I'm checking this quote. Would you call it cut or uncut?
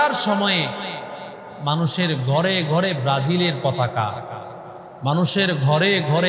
uncut